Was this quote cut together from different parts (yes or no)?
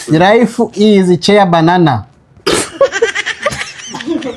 no